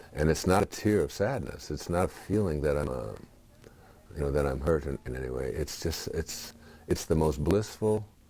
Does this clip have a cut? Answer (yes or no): no